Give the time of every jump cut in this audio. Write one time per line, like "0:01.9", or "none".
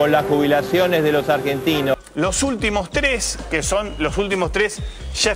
none